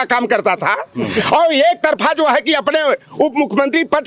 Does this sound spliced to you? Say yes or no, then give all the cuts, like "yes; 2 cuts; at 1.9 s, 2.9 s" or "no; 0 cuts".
no; 0 cuts